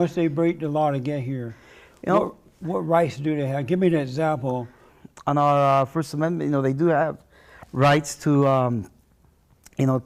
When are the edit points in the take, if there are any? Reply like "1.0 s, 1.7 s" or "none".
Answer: none